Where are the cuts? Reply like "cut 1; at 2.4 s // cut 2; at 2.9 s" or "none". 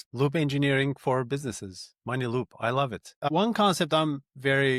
cut 1; at 3.2 s